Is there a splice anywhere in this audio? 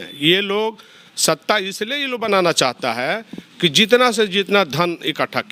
no; 0 cuts

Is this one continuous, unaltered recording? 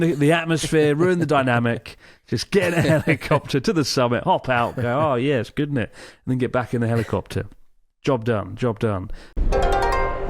no; 1 cut; at 9.3 s

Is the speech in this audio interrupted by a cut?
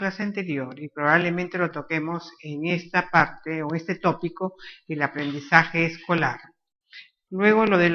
no; 0 cuts

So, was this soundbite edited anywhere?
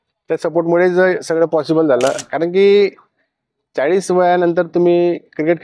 no; 0 cuts

